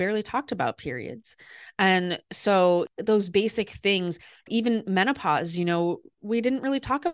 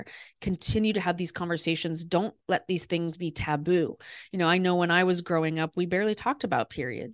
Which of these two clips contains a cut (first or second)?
first